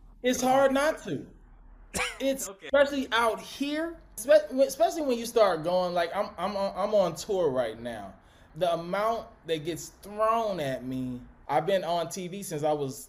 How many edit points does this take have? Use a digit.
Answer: 4